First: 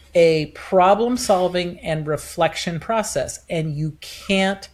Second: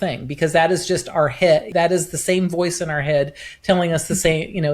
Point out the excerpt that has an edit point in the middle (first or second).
second